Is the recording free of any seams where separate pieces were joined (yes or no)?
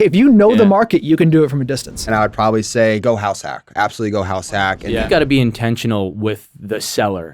no